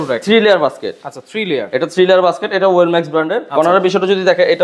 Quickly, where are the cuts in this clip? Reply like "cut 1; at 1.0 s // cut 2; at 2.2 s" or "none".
cut 1; at 3.4 s